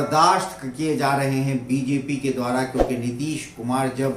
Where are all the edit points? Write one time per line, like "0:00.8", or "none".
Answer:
none